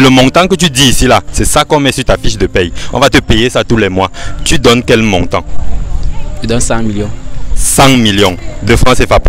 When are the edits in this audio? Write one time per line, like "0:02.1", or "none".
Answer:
none